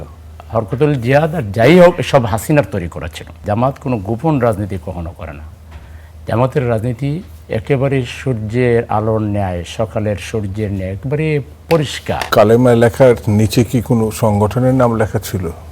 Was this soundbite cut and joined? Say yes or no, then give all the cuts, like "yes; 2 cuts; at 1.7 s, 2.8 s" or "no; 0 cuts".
yes; 2 cuts; at 3.3 s, 12.3 s